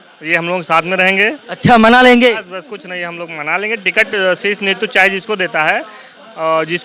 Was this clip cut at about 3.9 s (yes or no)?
no